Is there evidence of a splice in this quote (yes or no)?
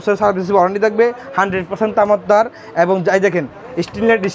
no